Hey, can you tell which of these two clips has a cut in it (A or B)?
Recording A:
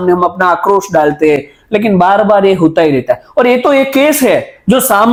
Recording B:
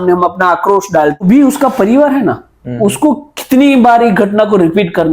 B